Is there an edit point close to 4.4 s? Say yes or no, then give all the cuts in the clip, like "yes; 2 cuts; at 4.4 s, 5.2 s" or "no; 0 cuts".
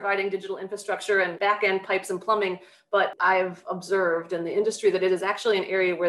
no; 2 cuts; at 1.3 s, 3.1 s